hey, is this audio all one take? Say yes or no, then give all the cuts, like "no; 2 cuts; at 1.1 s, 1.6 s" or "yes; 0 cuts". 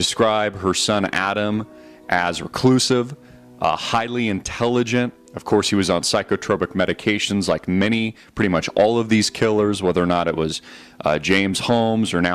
no; 1 cut; at 5.4 s